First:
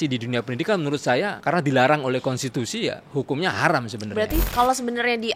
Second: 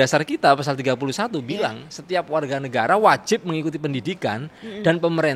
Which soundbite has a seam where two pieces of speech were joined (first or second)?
first